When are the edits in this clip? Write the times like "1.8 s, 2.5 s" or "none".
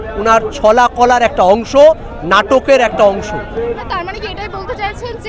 none